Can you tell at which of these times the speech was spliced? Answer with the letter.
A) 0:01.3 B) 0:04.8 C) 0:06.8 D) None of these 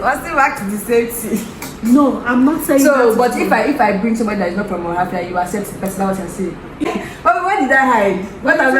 C